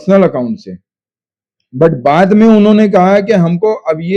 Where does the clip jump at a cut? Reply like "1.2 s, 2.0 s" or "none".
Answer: none